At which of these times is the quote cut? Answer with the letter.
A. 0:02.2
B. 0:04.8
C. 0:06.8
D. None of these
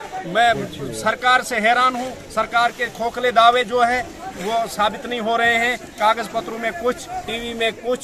D